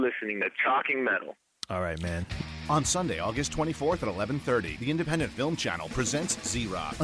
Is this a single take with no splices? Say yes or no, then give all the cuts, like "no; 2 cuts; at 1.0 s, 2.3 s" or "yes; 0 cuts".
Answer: no; 1 cut; at 2.3 s